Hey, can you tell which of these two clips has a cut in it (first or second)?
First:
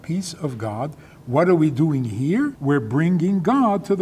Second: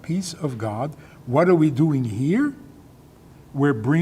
first